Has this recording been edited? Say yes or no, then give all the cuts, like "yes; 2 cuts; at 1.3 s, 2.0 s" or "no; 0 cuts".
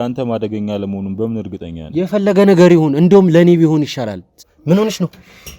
yes; 1 cut; at 4.4 s